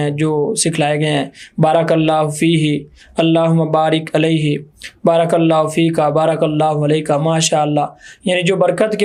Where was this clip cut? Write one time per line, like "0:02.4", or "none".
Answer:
none